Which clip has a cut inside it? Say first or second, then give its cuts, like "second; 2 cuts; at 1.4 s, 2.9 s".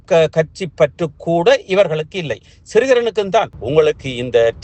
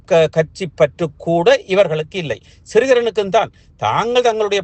first; 1 cut; at 3.6 s